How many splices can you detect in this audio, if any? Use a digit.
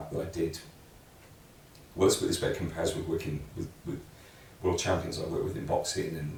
0